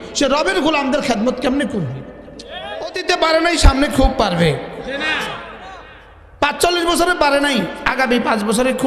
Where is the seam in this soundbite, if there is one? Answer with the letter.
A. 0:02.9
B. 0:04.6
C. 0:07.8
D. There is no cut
A